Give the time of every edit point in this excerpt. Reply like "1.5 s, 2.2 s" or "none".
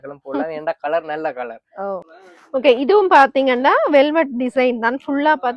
2.0 s